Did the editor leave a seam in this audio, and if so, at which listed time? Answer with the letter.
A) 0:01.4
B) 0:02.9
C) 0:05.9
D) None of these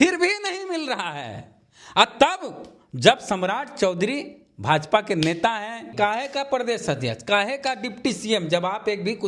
C